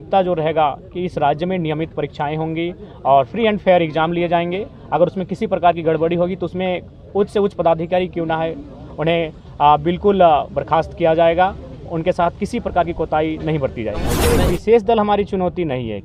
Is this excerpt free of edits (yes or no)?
no